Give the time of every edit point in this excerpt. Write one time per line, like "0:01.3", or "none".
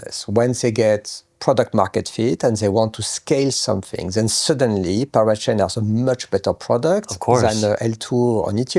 none

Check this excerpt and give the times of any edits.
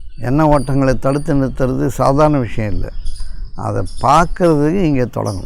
none

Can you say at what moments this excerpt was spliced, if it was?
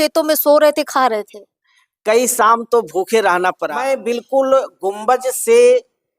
0:03.7

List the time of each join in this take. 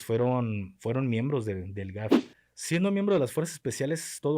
0:02.2

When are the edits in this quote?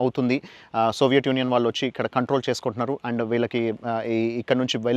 none

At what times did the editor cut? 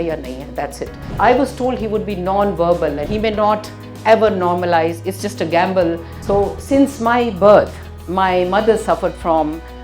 0:01.0
0:03.0
0:06.1

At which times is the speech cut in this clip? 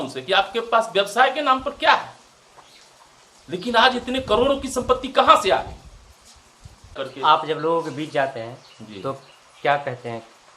0:06.9

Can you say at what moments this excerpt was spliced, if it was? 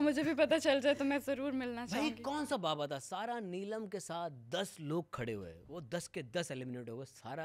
none

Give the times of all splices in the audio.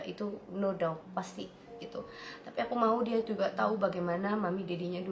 none

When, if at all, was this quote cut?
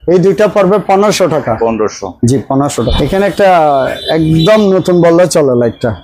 none

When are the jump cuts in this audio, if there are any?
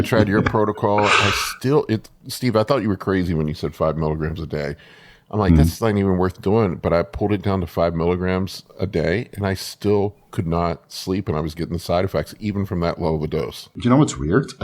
0:13.7

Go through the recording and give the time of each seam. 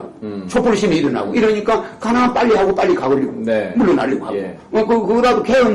0:03.6

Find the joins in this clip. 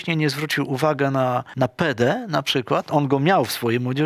0:01.5

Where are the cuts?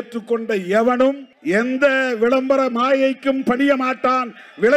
0:01.3

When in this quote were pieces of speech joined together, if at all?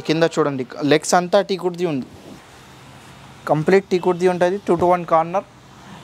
none

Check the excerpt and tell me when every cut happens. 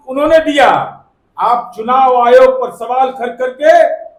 none

